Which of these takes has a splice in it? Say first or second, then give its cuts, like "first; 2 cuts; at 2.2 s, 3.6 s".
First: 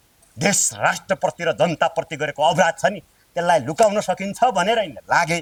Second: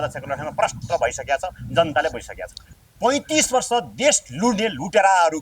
second; 1 cut; at 2.7 s